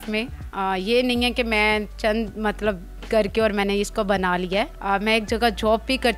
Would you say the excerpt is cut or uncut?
cut